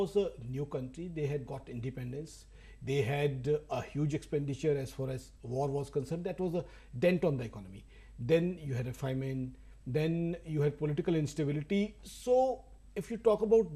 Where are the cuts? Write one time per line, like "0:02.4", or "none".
0:09.9

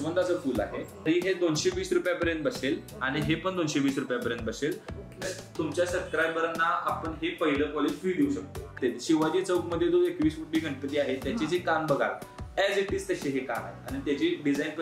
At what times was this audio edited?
0:01.1
0:05.2
0:08.7

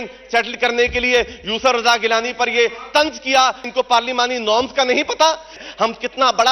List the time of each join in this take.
0:03.7
0:05.6

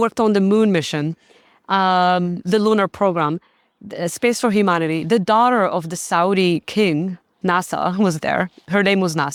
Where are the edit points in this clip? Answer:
none

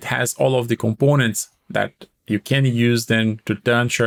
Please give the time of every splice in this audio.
none

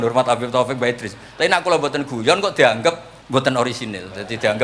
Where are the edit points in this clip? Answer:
0:03.1

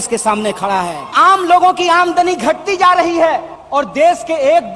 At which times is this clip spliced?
0:01.1
0:03.5

